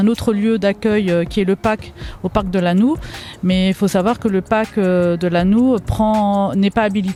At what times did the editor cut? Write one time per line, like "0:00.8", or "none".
none